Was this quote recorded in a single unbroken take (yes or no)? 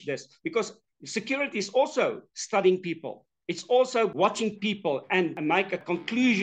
no